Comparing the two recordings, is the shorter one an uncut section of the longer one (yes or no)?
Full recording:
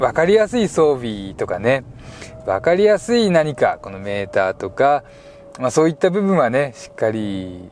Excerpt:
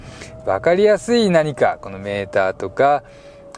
yes